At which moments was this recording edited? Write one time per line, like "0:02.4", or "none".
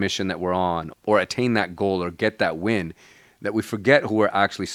none